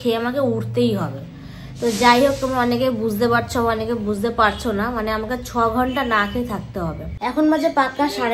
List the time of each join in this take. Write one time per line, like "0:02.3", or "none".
0:07.0